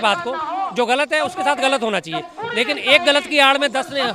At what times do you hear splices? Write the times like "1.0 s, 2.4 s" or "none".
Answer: none